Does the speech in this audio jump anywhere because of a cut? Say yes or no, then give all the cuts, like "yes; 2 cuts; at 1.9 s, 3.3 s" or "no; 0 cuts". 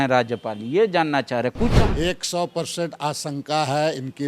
yes; 1 cut; at 1.7 s